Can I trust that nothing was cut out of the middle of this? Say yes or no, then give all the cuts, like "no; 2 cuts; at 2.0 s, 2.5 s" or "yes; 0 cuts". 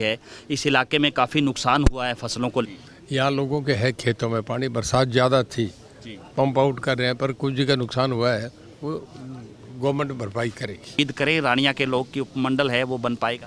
no; 2 cuts; at 2.7 s, 11.0 s